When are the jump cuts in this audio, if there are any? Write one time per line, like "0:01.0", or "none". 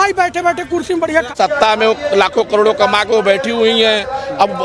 0:01.0